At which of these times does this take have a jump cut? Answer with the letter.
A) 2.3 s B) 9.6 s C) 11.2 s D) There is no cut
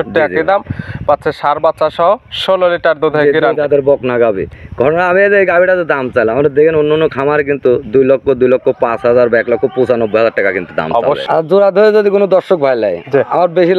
C